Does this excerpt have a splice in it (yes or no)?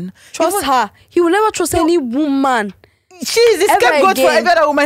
no